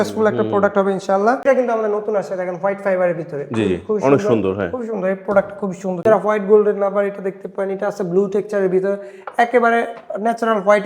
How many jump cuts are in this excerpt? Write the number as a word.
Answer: two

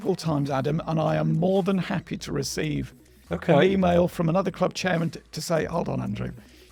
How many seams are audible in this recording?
zero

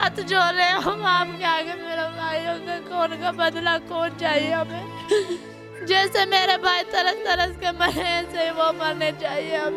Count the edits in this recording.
zero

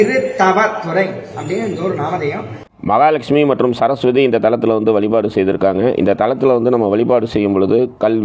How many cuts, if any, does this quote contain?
one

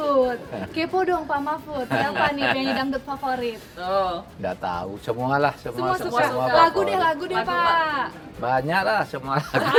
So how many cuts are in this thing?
zero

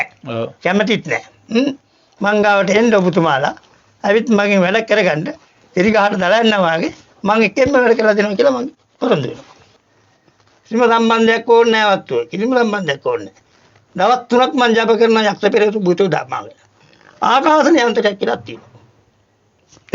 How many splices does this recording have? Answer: one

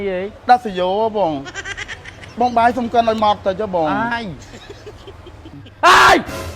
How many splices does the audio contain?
one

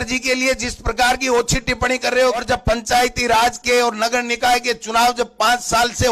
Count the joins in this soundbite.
one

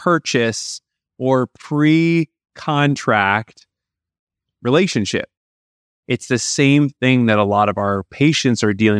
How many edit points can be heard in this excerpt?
one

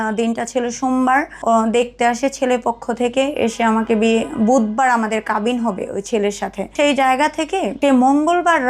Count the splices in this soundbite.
three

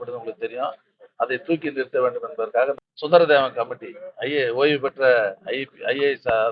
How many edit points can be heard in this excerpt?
one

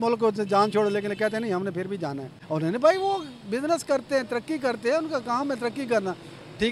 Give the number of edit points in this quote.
one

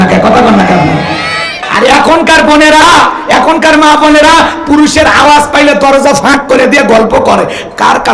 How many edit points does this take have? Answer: one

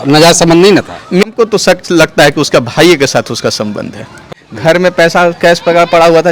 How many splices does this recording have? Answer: two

